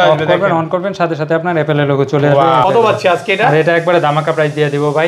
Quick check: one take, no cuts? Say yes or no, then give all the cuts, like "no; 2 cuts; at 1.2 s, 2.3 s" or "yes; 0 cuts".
no; 1 cut; at 2.6 s